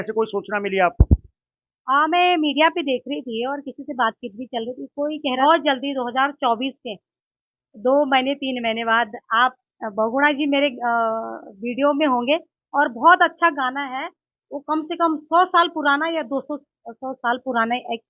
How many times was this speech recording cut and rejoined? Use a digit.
1